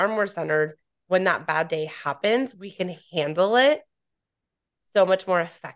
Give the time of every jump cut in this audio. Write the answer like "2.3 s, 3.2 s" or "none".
none